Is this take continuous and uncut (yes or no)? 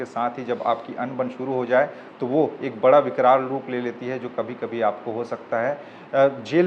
yes